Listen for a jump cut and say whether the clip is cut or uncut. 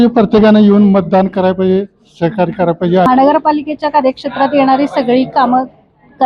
cut